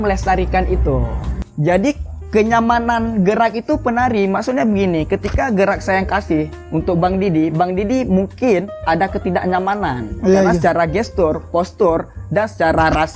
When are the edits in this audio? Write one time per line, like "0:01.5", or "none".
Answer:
0:01.4

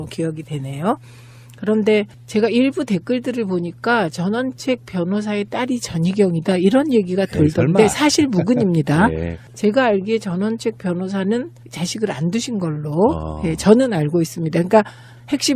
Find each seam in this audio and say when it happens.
none

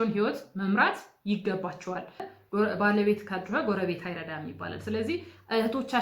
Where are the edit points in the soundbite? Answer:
0:02.2

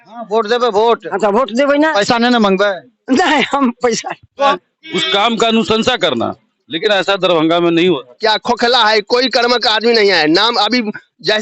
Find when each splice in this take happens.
0:04.6
0:08.1

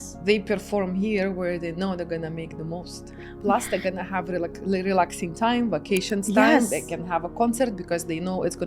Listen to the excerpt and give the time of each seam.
none

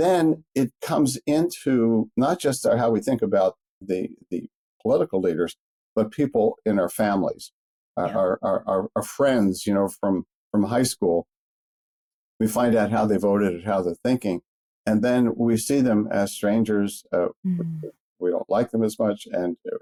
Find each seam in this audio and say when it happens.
none

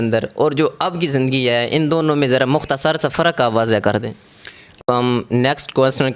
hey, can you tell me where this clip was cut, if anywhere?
0:04.8

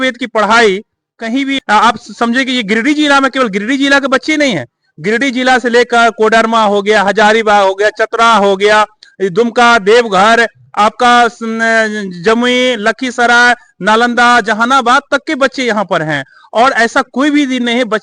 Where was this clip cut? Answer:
0:01.6

